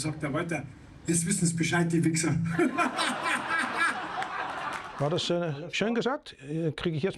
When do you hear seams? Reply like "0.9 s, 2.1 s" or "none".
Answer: 4.9 s